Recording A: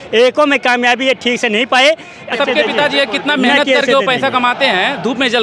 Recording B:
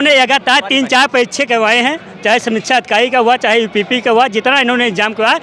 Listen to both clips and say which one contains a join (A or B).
A